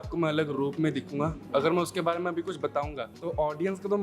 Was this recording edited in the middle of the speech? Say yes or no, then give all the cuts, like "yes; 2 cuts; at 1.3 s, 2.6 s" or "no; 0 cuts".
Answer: yes; 1 cut; at 3.1 s